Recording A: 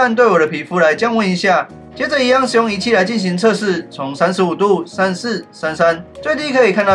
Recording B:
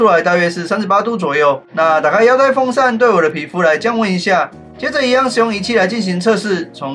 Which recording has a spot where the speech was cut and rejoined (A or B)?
B